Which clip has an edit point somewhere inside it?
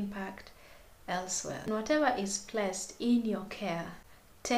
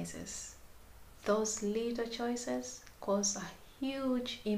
first; 1 cut; at 1.5 s

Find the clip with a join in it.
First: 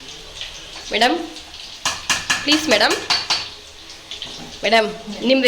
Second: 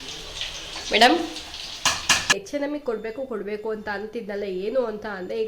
second; 1 cut; at 2.4 s

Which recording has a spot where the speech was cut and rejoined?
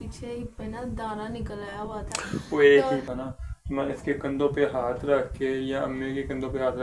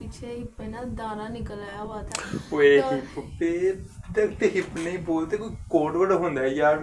first; 1 cut; at 3.1 s

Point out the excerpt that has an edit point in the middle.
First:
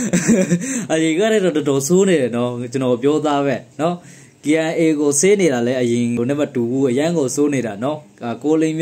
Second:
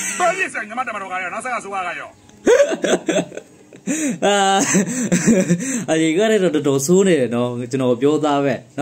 first; 1 cut; at 6.2 s

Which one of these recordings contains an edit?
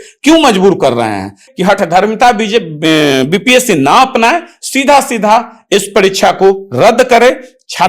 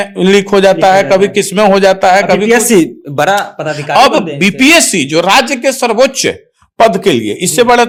first; 1 cut; at 1.4 s

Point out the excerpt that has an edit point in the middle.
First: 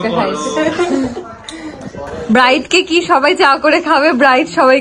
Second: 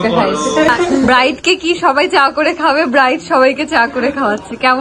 second; 1 cut; at 1.1 s

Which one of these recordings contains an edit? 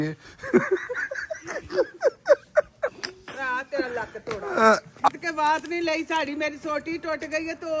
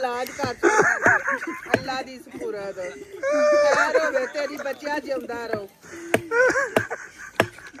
first; 1 cut; at 5.1 s

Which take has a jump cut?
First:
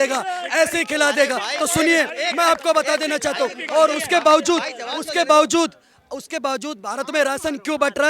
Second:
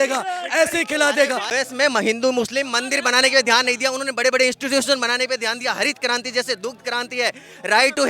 second; 1 cut; at 1.5 s

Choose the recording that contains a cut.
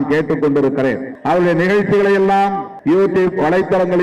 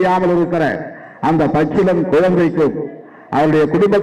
first; 2 cuts; at 1.1 s, 2.7 s

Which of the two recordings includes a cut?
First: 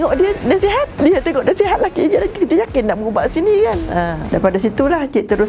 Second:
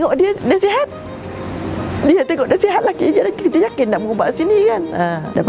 first; 1 cut; at 0.9 s

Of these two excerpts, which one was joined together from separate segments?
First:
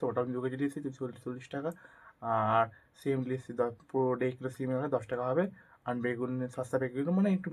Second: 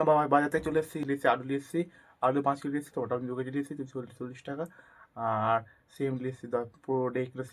second; 1 cut; at 1.0 s

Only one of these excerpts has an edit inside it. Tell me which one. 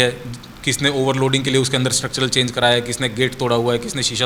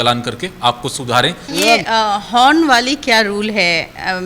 second; 1 cut; at 1.5 s

